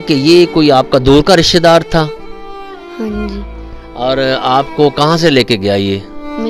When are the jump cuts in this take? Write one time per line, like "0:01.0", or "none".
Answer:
none